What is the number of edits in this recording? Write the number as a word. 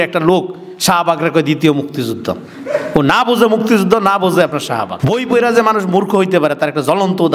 one